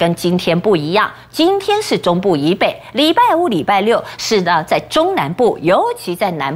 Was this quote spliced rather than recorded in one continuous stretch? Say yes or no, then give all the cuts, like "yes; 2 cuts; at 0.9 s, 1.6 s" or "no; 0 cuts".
no; 0 cuts